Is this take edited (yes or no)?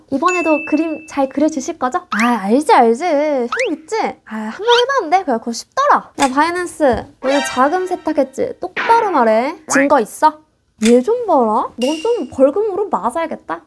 yes